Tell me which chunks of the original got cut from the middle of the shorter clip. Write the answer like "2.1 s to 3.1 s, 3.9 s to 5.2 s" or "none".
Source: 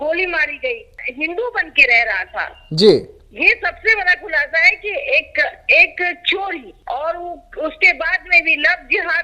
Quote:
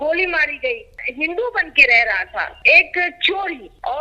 2.6 s to 5.6 s